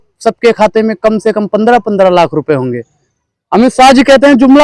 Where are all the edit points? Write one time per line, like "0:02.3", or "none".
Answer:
none